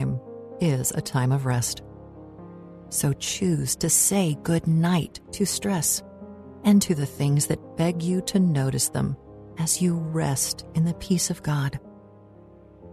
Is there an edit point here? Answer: no; 0 cuts

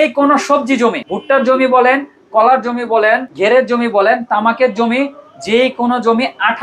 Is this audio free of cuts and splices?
no; 2 cuts; at 1.1 s, 3.3 s

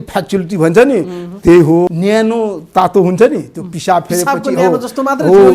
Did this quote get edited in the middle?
yes; 1 cut; at 1.9 s

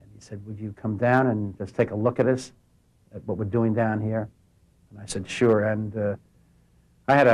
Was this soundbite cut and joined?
no; 0 cuts

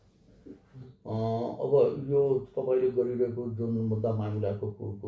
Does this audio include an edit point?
yes; 1 cut; at 0.9 s

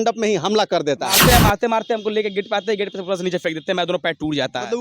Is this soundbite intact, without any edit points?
no; 1 cut; at 1.2 s

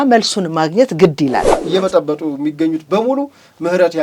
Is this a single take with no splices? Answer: no; 1 cut; at 1.6 s

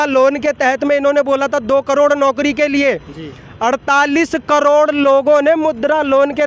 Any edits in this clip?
no; 0 cuts

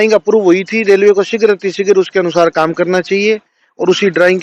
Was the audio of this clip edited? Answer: no; 0 cuts

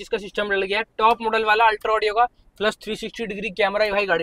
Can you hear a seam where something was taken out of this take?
no; 0 cuts

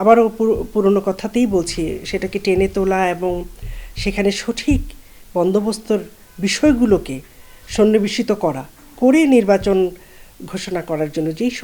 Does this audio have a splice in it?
no; 0 cuts

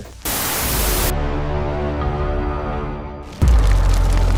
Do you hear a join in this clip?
no; 0 cuts

